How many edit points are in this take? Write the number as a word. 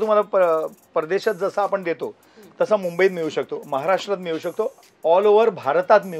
one